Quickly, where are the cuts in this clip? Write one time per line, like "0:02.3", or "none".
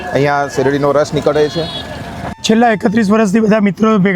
0:02.3